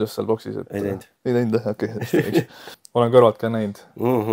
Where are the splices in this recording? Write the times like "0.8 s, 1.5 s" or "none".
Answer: 3.0 s